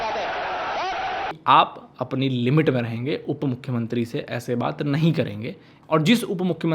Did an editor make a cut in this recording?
yes; 2 cuts; at 1.4 s, 5.7 s

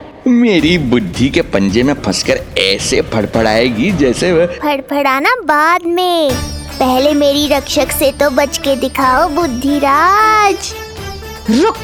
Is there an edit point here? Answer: no; 0 cuts

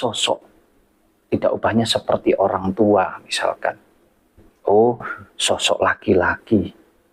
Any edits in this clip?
no; 0 cuts

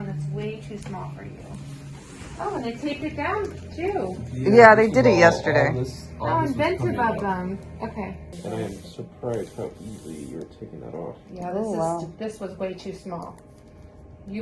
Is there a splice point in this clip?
no; 0 cuts

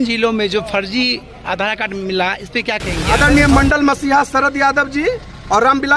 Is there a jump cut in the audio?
yes; 1 cut; at 3.1 s

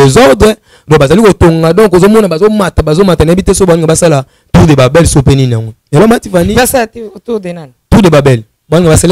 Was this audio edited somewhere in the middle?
no; 0 cuts

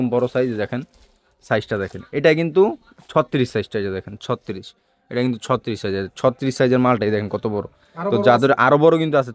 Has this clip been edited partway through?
no; 0 cuts

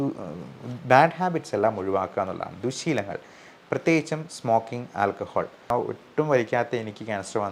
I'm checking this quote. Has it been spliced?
yes; 1 cut; at 5.7 s

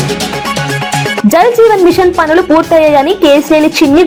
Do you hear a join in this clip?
no; 0 cuts

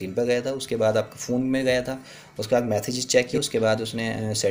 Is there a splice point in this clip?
yes; 1 cut; at 3.3 s

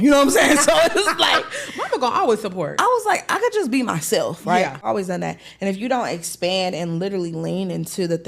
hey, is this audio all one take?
no; 1 cut; at 4.8 s

